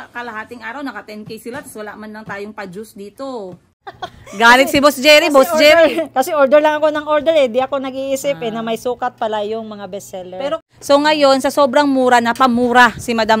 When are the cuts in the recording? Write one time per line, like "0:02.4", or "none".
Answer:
0:03.7
0:10.6